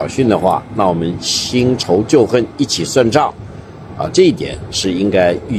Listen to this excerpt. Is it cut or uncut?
uncut